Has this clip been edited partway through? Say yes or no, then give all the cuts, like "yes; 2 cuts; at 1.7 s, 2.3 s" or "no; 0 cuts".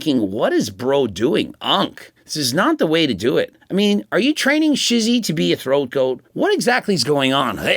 yes; 2 cuts; at 3.6 s, 6.2 s